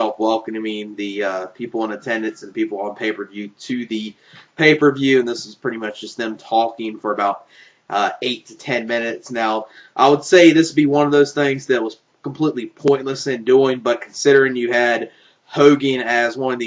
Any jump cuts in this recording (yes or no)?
yes